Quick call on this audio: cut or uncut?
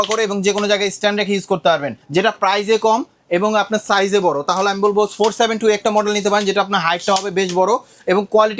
cut